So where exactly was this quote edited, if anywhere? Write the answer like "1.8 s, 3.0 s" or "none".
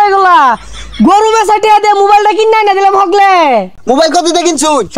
3.7 s